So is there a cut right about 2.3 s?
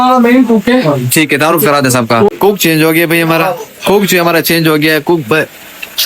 yes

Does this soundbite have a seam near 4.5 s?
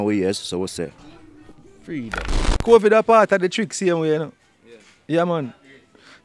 no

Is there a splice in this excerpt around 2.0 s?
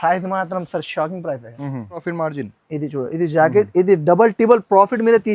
yes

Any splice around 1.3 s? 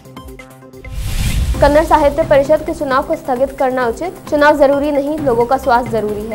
yes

